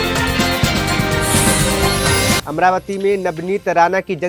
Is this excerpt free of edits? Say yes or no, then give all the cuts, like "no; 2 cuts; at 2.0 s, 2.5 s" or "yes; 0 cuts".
yes; 0 cuts